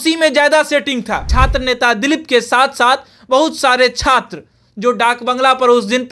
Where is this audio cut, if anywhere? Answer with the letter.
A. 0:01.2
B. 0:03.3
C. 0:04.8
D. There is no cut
A